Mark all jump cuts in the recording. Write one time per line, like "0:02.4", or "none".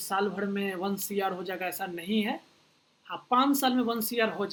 none